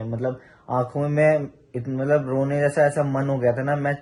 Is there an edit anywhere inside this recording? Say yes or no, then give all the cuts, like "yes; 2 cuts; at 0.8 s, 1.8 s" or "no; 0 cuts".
no; 0 cuts